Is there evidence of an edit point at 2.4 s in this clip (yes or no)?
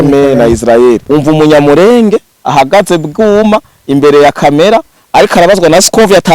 no